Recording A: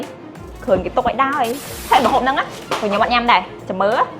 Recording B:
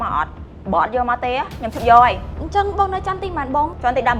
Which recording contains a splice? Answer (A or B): A